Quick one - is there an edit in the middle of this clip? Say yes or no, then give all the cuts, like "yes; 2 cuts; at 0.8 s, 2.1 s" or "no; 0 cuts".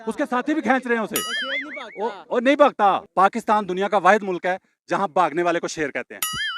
yes; 1 cut; at 3.0 s